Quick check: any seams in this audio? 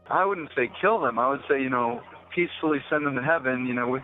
no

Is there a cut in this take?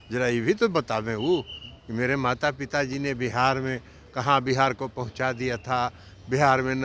no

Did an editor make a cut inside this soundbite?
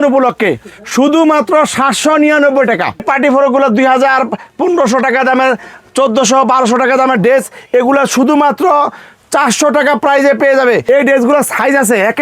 yes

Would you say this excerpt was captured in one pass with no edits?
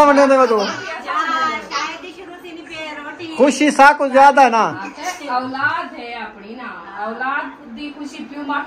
yes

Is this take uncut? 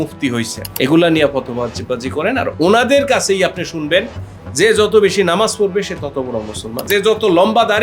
no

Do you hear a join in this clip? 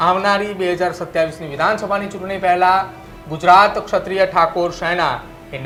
no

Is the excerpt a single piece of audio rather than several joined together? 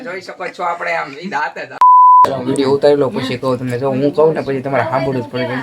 no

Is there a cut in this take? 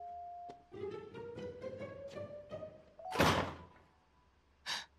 no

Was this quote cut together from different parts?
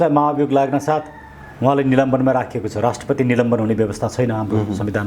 no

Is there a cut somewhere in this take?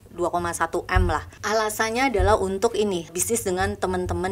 yes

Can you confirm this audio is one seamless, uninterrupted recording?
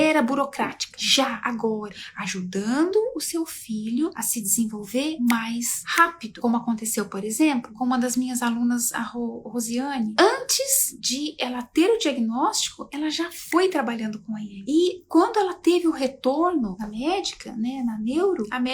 no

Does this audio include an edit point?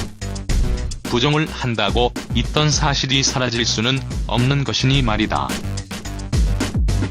yes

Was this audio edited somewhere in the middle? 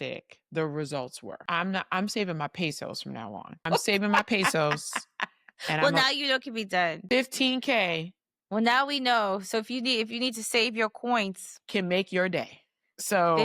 yes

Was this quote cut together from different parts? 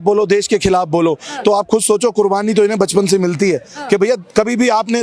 no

